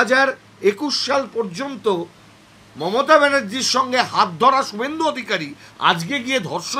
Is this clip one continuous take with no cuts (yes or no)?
yes